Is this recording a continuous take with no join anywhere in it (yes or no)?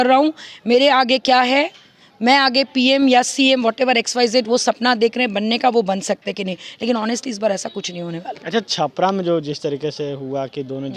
yes